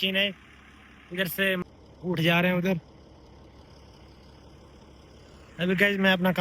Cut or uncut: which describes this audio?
cut